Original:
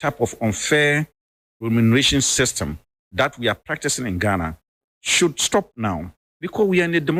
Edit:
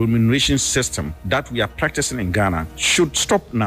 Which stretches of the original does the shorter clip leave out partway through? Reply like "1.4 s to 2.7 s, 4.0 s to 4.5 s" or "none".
2.8 s to 3.0 s, 4.6 s to 5.0 s